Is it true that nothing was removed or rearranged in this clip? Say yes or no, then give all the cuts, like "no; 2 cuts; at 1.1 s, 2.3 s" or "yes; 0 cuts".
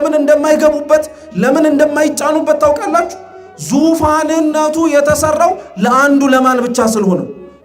yes; 0 cuts